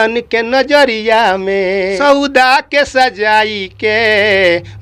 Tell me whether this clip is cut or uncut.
cut